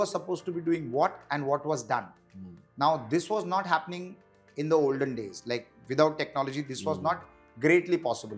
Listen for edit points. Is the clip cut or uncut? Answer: uncut